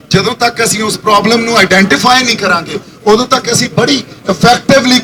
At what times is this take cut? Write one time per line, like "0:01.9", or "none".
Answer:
none